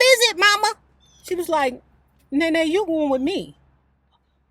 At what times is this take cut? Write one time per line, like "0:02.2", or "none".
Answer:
0:00.9